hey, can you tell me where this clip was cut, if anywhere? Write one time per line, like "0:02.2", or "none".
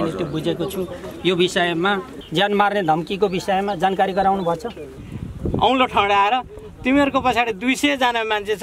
0:02.2
0:05.0